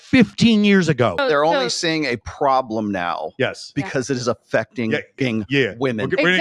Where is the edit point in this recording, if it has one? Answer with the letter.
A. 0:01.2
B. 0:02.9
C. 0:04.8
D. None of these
A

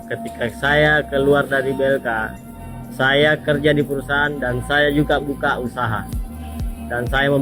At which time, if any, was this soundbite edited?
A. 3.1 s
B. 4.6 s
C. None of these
C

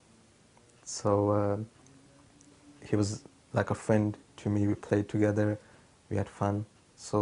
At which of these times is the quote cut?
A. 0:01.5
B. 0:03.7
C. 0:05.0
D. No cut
B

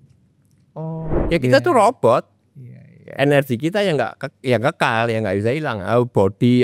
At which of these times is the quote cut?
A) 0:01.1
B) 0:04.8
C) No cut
A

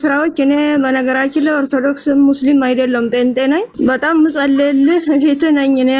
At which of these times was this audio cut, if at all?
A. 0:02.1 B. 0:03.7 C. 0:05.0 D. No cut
B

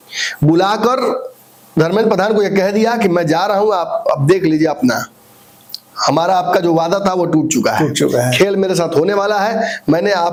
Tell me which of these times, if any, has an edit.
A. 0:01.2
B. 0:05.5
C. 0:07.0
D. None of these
D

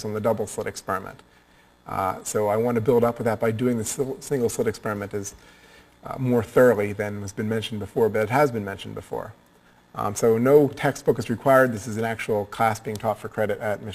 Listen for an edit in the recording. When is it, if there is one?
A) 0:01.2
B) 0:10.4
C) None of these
B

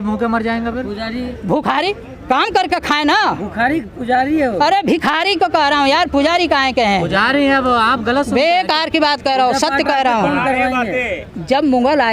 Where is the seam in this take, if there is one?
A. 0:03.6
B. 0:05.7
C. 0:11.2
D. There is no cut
C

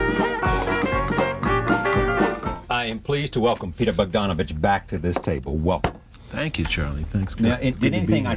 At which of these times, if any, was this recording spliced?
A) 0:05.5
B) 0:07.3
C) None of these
A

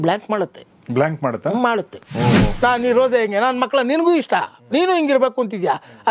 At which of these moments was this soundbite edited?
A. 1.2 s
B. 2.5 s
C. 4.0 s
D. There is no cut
B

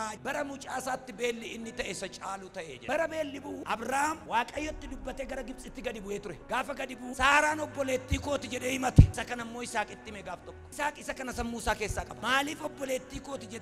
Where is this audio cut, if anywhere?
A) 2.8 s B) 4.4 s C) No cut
A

